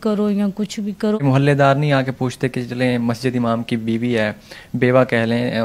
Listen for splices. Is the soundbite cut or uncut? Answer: cut